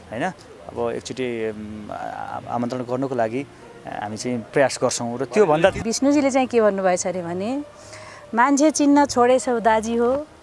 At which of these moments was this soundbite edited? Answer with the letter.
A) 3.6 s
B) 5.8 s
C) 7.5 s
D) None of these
B